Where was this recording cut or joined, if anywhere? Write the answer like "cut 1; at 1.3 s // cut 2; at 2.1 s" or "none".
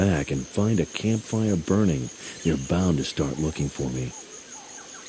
none